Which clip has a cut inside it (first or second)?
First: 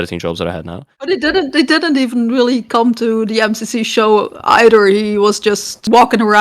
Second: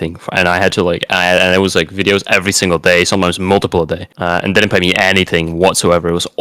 first